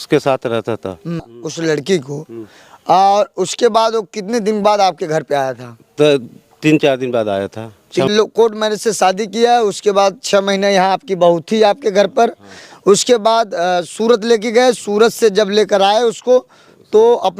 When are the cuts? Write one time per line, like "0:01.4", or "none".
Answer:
0:01.3
0:08.1